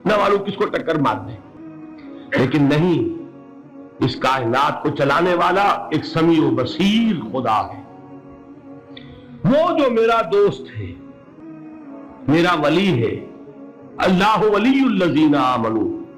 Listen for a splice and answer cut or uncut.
cut